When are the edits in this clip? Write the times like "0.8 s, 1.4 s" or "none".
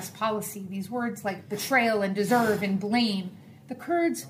none

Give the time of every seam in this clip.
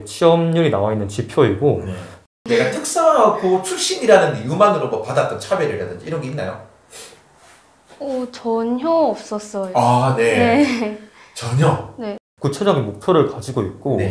2.2 s, 12.1 s

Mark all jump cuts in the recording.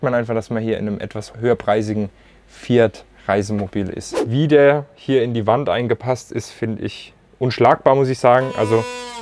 1.3 s, 4.1 s

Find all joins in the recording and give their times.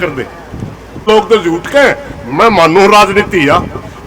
1.1 s

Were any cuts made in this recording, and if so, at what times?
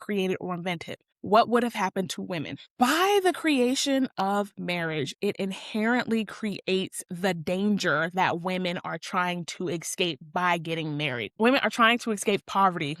2.7 s, 11.2 s

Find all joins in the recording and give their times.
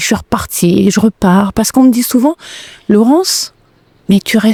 none

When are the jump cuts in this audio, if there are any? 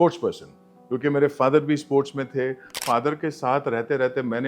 2.8 s

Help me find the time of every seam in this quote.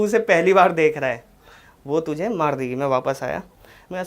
none

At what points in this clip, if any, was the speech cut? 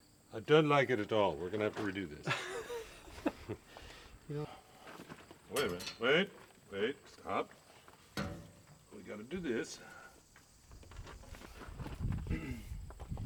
none

